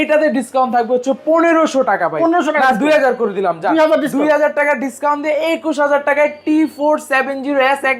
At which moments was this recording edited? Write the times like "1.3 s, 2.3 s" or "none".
none